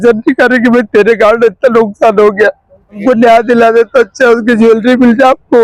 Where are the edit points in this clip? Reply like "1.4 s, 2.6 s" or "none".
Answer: 3.0 s